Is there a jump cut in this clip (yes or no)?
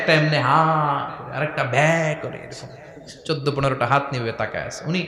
no